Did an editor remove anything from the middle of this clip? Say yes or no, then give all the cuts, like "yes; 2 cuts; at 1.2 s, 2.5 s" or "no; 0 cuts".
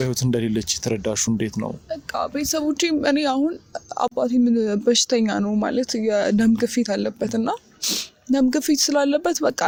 no; 0 cuts